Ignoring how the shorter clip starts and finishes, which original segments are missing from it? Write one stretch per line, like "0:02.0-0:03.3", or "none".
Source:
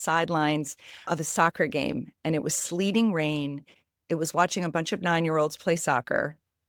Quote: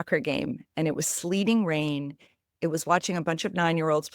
none